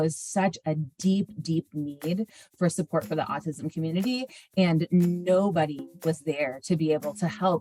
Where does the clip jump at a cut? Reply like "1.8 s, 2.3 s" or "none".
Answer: none